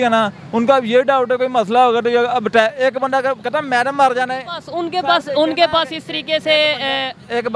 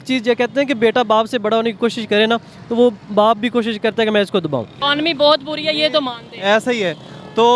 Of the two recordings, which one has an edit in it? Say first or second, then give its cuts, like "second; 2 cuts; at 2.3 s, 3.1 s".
second; 1 cut; at 4.8 s